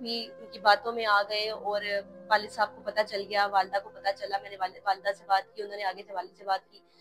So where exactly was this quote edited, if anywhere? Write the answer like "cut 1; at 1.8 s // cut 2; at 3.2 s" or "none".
none